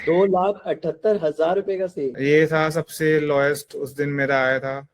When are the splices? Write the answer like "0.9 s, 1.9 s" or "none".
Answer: 2.1 s